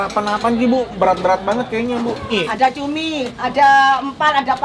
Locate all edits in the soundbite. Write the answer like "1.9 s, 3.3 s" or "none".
2.3 s